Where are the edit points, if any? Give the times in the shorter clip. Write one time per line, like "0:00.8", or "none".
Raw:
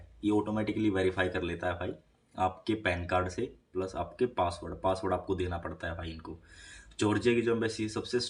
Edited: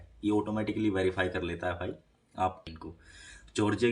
0:02.6